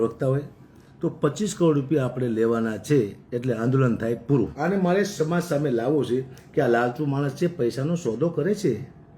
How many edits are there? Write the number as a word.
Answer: one